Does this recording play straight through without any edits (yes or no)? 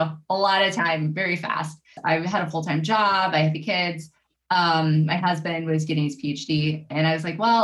no